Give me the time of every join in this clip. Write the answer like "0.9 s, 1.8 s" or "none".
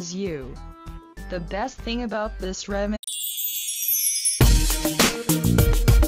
none

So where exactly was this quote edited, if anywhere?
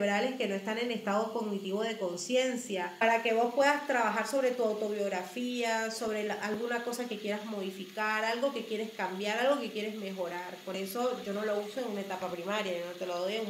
3.0 s

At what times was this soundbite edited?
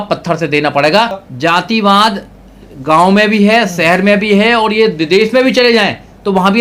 1.2 s

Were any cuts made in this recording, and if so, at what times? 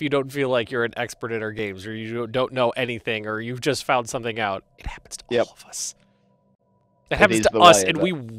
none

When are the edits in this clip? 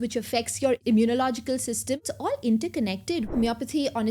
0.8 s, 2.1 s, 3.3 s

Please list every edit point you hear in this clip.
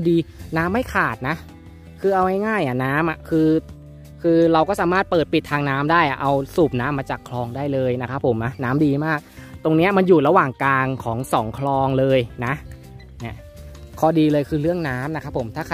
none

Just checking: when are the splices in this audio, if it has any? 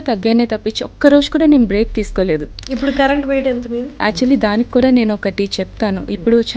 2.6 s, 3.9 s

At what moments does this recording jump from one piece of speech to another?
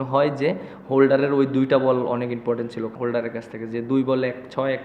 2.9 s

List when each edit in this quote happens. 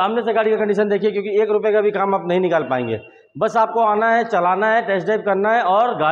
none

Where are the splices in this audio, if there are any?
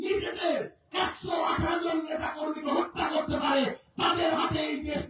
none

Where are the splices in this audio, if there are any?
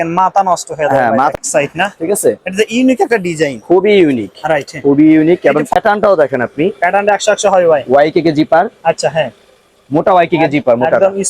1.3 s, 5.7 s

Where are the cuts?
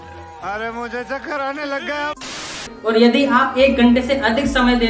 2.7 s

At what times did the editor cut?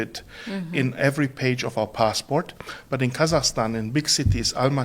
none

